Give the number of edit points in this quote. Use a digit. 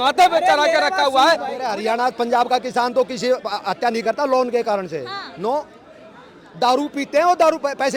1